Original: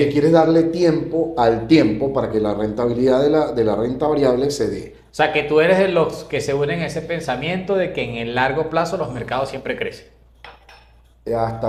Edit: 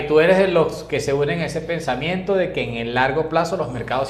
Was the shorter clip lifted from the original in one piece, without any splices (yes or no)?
yes